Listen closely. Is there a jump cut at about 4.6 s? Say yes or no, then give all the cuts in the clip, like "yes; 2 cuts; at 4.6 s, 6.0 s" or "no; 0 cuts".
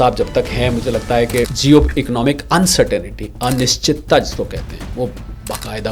no; 1 cut; at 1.5 s